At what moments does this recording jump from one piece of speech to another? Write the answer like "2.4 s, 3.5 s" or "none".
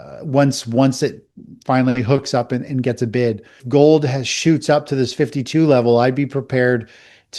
3.6 s